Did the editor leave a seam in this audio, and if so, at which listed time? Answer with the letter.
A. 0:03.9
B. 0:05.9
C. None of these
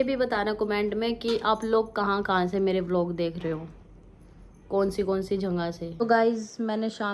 B